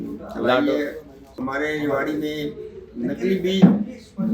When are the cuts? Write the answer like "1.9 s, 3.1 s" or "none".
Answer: 1.4 s